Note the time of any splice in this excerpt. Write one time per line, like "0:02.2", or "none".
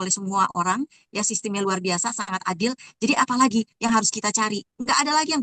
none